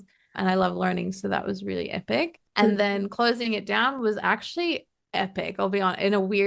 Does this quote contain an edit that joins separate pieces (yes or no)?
yes